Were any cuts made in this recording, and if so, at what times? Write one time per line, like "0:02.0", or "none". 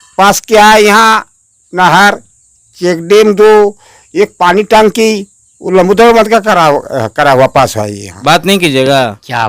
0:08.1